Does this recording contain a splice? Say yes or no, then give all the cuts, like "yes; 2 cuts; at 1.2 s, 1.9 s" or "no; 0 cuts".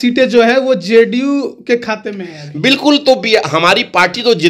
no; 0 cuts